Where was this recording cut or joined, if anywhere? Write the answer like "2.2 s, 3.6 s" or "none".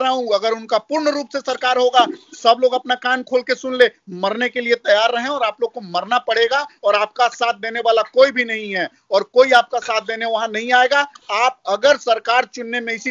none